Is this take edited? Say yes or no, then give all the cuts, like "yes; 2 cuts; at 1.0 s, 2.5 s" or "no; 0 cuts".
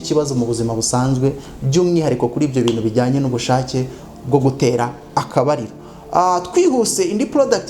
no; 0 cuts